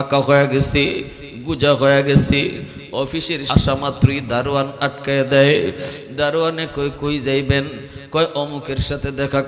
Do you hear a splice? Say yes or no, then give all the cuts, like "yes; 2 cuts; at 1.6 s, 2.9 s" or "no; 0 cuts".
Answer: yes; 1 cut; at 3.4 s